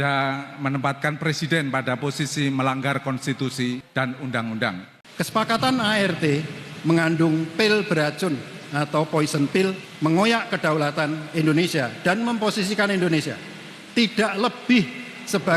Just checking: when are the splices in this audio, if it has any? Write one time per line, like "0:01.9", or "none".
0:04.9